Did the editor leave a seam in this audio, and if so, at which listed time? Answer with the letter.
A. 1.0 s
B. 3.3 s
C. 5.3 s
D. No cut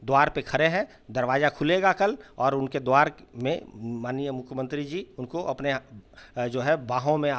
D